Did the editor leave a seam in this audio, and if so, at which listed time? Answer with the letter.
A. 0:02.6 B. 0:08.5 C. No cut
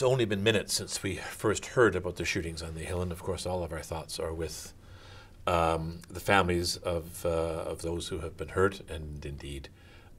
A